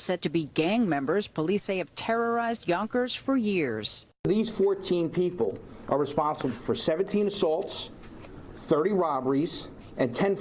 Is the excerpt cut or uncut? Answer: uncut